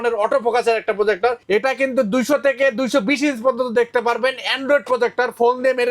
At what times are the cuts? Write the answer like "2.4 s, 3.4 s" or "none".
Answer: 1.4 s